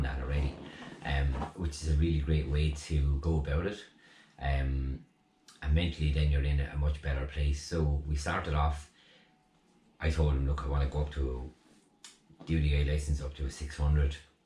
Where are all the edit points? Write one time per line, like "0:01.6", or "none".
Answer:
0:01.8